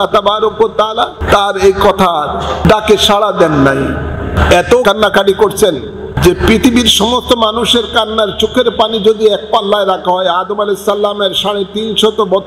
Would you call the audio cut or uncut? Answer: cut